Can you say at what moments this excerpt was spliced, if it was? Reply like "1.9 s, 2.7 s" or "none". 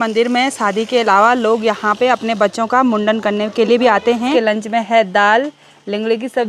4.3 s